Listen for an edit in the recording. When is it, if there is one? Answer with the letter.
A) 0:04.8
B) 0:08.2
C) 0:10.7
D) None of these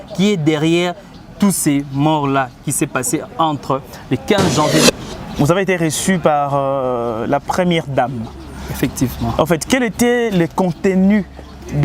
A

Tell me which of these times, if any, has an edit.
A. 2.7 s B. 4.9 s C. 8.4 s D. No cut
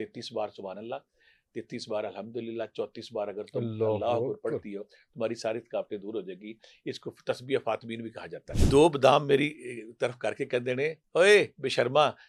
C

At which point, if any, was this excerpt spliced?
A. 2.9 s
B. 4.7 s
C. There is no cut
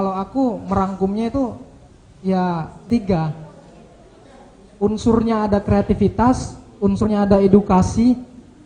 A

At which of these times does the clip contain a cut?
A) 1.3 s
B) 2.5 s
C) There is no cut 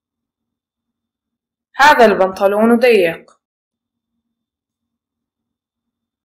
C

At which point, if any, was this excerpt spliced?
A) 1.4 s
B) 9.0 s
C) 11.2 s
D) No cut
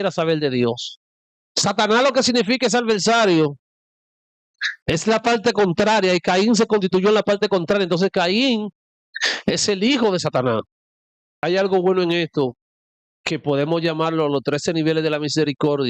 C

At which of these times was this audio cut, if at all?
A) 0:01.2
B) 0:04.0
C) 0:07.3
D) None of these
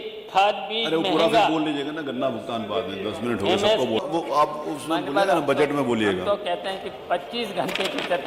B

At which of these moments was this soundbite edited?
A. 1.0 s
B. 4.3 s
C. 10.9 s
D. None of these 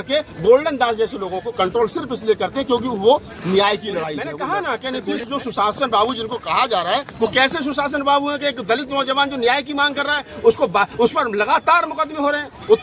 B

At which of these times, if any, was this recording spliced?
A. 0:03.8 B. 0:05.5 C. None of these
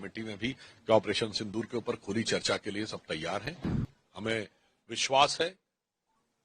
A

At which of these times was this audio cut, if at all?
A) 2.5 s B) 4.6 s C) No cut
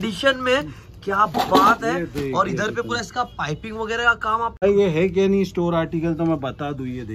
B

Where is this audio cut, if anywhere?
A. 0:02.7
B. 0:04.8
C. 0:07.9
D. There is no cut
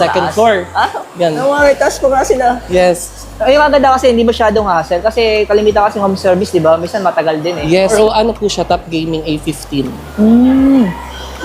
C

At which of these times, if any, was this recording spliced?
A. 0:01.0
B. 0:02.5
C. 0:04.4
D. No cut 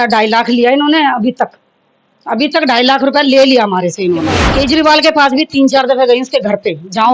C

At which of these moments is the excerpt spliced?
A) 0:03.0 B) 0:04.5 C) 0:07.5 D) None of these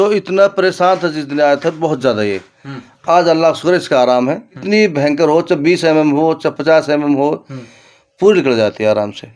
B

